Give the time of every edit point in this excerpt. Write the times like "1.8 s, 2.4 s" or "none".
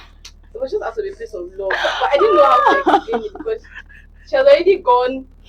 none